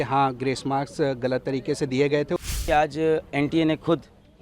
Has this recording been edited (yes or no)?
yes